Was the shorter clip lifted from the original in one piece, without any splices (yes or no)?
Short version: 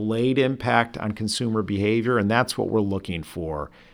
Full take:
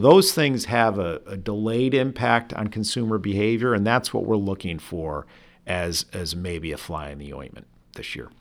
yes